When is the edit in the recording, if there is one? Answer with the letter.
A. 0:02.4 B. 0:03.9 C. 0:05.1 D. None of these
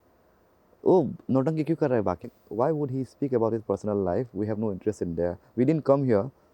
A